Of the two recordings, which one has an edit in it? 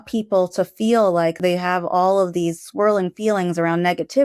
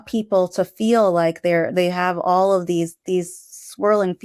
first; 2 cuts; at 1.4 s, 2.6 s

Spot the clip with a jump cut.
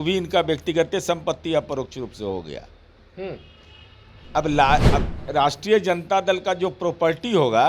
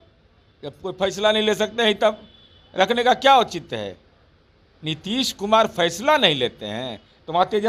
first; 1 cut; at 5.2 s

